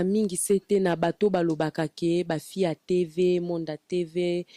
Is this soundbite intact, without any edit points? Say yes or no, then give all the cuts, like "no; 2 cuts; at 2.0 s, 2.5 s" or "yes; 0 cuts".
yes; 0 cuts